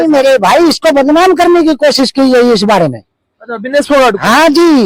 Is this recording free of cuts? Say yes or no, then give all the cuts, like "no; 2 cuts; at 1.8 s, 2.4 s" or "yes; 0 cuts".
yes; 0 cuts